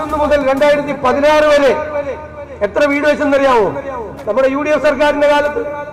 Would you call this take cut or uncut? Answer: uncut